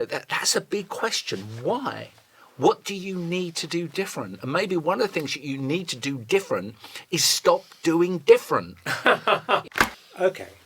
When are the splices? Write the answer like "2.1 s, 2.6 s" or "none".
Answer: 9.6 s